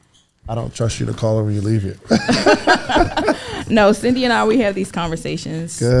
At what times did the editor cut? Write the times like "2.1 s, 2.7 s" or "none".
none